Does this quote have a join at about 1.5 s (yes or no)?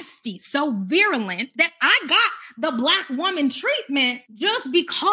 yes